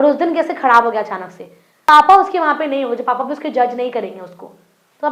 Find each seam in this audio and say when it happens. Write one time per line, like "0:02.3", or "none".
0:01.7